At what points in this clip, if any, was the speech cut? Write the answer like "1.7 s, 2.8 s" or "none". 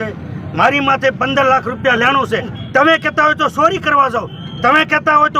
2.6 s